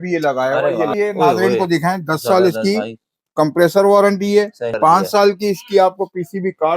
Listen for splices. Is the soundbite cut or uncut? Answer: cut